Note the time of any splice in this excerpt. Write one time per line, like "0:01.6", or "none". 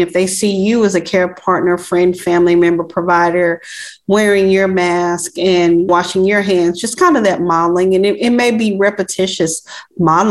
none